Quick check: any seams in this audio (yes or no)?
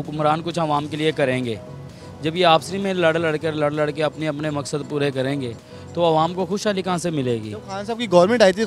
no